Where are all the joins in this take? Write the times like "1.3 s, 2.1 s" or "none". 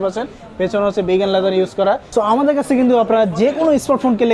2.0 s